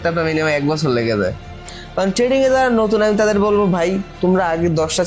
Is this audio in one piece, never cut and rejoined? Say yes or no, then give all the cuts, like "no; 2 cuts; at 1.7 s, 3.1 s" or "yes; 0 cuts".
no; 1 cut; at 1.8 s